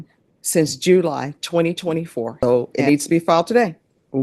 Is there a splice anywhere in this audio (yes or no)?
yes